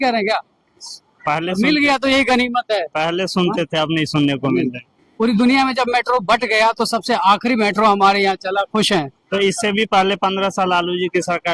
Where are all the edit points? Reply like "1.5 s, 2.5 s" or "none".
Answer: none